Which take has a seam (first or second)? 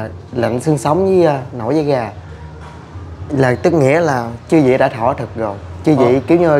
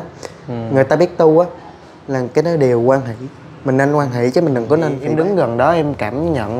second